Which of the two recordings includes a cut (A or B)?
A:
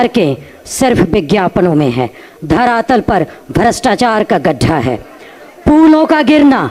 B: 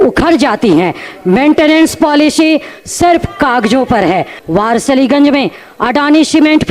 B